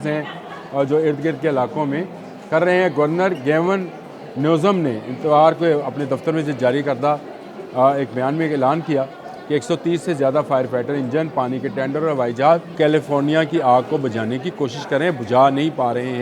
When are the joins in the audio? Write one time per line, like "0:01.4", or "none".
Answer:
0:12.7